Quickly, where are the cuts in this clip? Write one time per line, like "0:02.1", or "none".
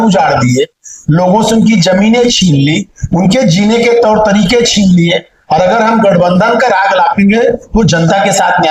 none